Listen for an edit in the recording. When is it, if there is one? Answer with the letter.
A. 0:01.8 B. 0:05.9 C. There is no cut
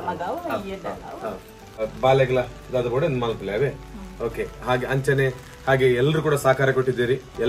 A